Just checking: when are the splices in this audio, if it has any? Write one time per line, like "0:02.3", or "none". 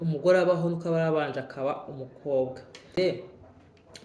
none